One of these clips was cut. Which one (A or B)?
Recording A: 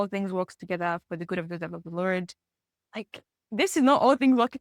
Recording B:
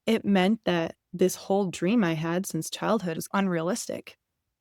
B